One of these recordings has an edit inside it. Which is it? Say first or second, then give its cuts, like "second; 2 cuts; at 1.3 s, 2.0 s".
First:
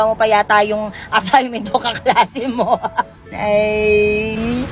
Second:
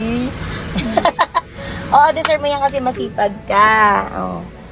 first; 1 cut; at 3.3 s